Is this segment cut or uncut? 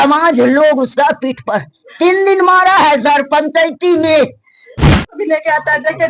cut